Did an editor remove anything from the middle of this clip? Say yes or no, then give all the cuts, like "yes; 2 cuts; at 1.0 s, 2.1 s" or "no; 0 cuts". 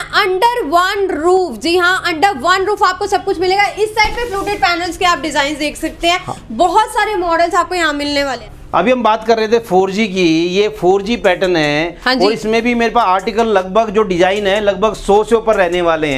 no; 0 cuts